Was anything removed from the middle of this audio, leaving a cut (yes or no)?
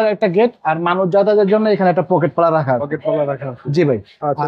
no